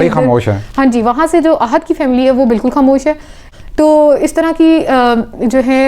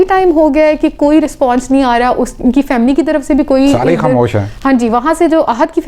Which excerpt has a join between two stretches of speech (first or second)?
first